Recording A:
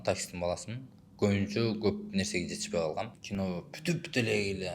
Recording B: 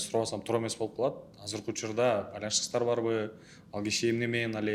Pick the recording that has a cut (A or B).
A